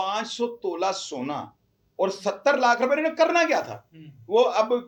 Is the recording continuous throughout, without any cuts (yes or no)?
yes